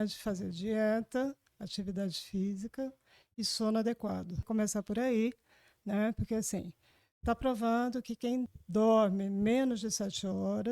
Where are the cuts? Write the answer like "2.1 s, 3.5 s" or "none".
4.4 s, 8.6 s